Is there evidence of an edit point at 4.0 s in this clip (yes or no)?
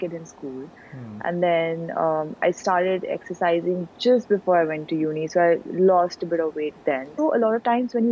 no